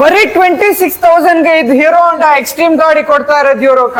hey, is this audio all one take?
yes; 0 cuts

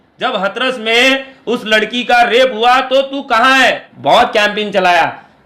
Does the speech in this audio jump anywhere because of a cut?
yes; 1 cut; at 3.9 s

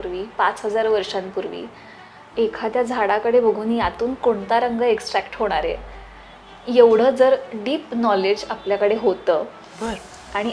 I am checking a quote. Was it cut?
no; 0 cuts

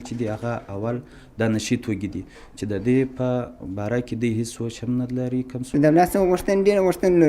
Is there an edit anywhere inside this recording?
yes; 1 cut; at 5.6 s

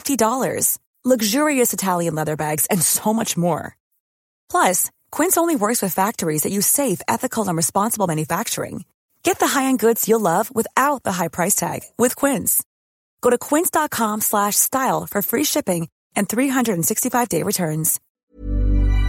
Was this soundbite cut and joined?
yes; 1 cut; at 18.0 s

